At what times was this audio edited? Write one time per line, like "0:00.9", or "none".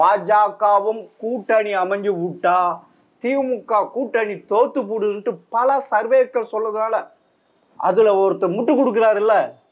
none